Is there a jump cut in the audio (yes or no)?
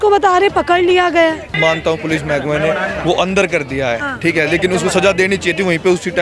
yes